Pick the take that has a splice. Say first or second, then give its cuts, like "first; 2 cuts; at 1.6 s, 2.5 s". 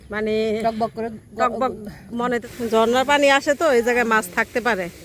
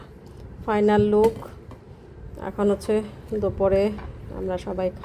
first; 1 cut; at 2.5 s